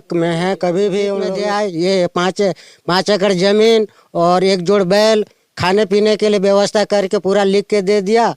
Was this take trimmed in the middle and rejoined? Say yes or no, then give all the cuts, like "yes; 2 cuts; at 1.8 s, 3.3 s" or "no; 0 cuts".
yes; 1 cut; at 1.4 s